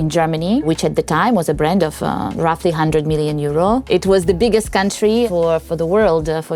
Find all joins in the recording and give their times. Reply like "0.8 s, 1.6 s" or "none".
none